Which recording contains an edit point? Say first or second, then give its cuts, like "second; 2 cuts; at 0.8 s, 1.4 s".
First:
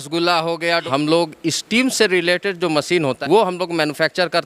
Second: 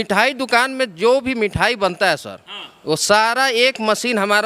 first; 2 cuts; at 0.8 s, 3.2 s